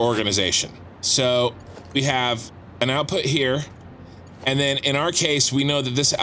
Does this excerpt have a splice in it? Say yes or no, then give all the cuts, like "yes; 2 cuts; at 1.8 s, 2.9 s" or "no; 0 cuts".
yes; 2 cuts; at 1.0 s, 1.7 s